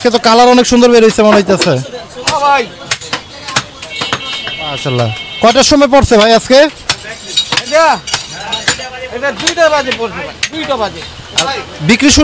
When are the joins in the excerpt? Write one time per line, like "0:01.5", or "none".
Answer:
none